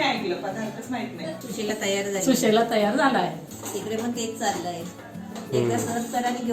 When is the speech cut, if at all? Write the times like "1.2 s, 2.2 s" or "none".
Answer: 1.4 s, 3.5 s